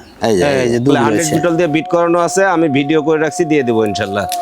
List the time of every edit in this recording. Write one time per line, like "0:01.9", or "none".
0:01.1